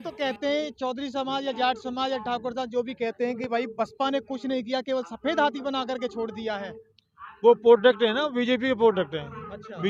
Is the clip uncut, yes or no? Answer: yes